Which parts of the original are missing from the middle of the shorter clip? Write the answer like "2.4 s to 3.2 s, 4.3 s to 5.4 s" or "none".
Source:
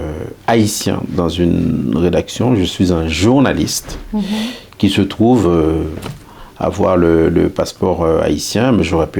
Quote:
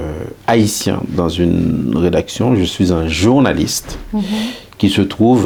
none

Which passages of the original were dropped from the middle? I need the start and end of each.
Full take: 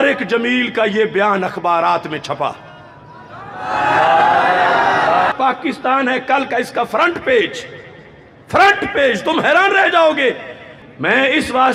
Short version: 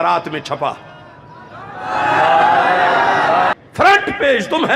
5.3 s to 8.3 s

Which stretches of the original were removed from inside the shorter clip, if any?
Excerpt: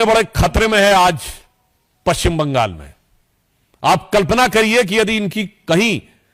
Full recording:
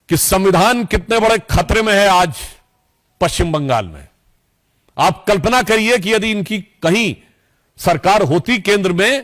none

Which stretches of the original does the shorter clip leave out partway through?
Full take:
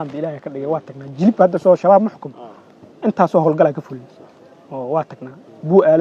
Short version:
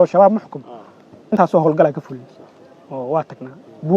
3.0 s to 3.1 s

